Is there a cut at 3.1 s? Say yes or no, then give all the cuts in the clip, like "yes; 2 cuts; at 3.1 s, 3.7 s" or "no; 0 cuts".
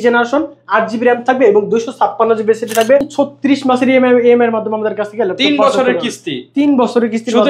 yes; 1 cut; at 3.1 s